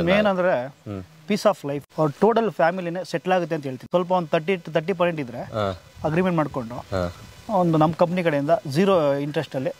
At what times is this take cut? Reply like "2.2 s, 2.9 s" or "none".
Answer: 1.9 s, 3.8 s